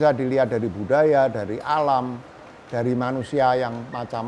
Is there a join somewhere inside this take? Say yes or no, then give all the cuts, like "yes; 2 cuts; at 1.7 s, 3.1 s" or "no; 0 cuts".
no; 0 cuts